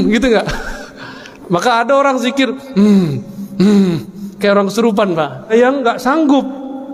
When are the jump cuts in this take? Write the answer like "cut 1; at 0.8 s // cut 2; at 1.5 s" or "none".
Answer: cut 1; at 5.5 s